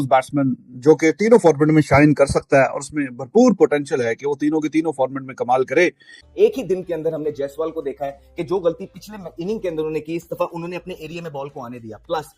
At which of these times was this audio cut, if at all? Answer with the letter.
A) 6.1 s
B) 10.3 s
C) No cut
A